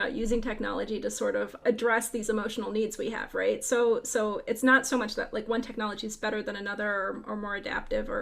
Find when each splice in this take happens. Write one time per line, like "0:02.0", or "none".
0:01.6